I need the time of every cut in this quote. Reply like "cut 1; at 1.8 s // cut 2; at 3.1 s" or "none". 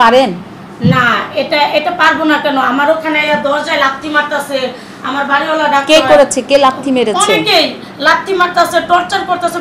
none